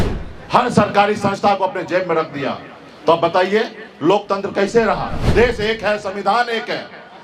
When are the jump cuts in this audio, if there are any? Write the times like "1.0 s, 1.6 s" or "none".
5.2 s